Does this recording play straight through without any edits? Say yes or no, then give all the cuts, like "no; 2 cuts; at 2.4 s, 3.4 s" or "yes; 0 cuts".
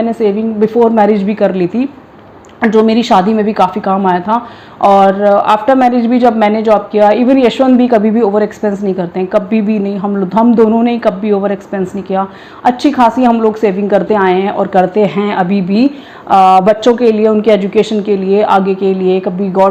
yes; 0 cuts